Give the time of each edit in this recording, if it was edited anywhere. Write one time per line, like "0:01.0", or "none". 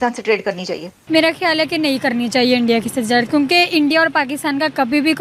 0:00.9